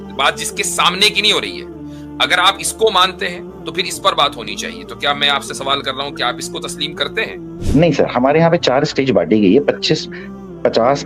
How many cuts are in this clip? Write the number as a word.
one